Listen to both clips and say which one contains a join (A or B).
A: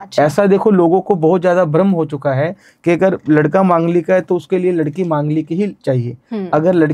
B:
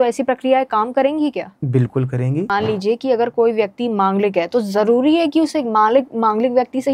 B